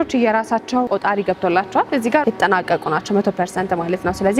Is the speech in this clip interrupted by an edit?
yes; 2 cuts; at 0.9 s, 2.2 s

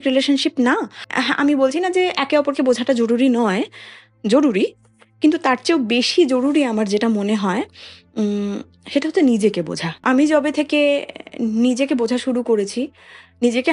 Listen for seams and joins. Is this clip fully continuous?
no; 2 cuts; at 1.1 s, 10.0 s

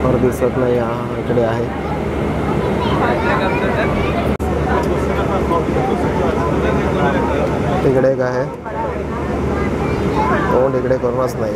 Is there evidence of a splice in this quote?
yes; 1 cut; at 4.4 s

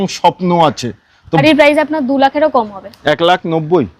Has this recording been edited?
yes; 1 cut; at 1.4 s

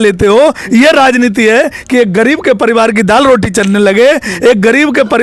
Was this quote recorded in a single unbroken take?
yes; 0 cuts

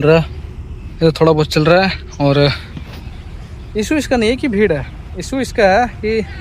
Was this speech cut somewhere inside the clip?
no; 0 cuts

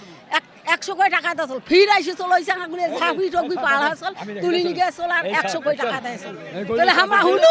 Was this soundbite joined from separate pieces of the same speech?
no; 0 cuts

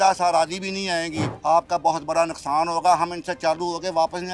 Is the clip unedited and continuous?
no; 1 cut; at 1.3 s

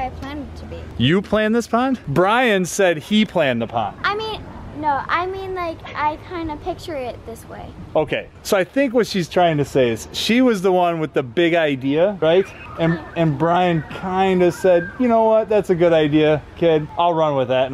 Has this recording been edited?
no; 0 cuts

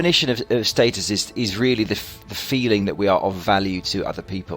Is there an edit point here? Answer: yes; 1 cut; at 1.3 s

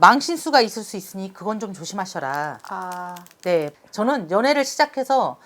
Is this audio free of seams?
no; 1 cut; at 3.7 s

